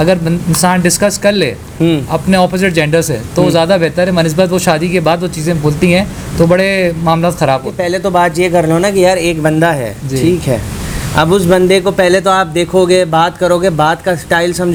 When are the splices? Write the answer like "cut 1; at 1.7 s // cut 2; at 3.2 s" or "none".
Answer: none